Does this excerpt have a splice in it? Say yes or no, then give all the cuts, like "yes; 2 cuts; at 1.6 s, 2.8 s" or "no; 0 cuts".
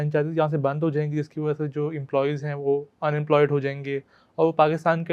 no; 0 cuts